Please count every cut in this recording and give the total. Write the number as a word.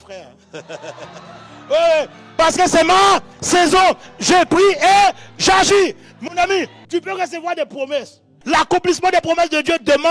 two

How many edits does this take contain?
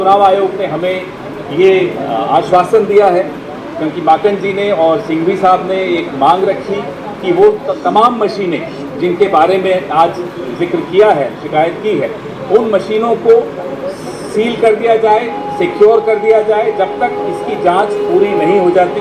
zero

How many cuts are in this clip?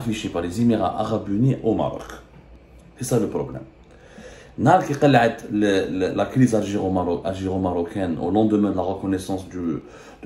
zero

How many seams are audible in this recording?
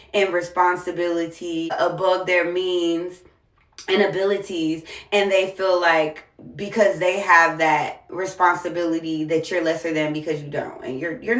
one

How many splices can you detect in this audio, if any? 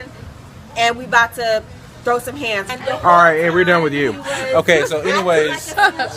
one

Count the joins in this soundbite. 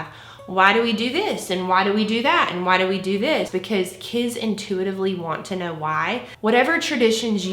two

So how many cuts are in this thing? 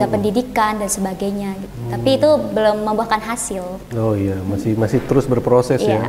zero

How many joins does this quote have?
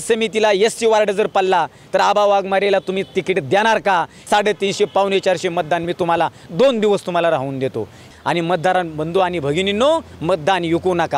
two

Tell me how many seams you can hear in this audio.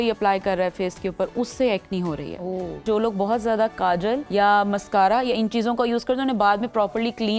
two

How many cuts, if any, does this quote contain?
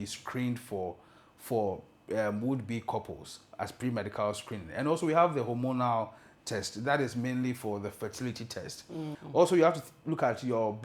one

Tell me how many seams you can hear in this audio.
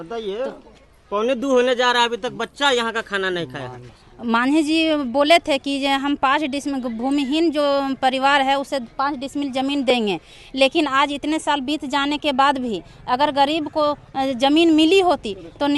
one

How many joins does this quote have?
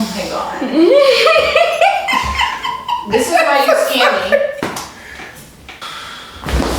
one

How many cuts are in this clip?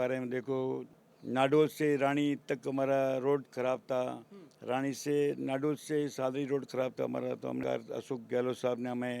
two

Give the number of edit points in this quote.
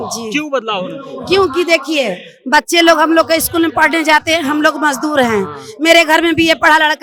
zero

